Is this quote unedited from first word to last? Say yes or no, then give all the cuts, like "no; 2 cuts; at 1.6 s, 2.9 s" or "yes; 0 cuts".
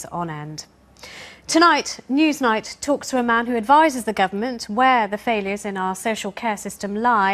no; 1 cut; at 1.6 s